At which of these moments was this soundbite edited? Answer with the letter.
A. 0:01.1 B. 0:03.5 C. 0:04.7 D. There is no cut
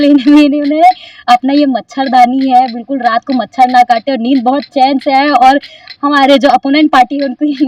D